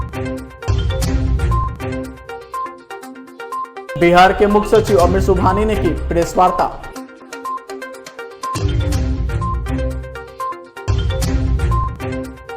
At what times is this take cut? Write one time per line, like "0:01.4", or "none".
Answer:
none